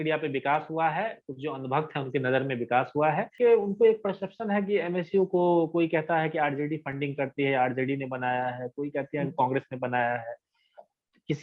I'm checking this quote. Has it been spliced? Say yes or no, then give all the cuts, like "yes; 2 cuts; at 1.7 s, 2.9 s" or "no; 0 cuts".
yes; 1 cut; at 3.3 s